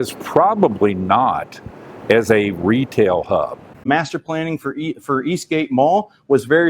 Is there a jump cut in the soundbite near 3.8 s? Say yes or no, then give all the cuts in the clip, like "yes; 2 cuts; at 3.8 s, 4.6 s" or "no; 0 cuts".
yes; 1 cut; at 3.8 s